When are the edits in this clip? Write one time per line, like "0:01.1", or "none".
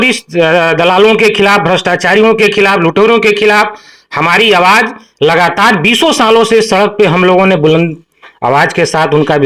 none